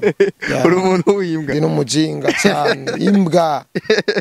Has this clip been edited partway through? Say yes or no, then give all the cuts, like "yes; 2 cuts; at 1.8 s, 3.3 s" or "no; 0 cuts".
no; 0 cuts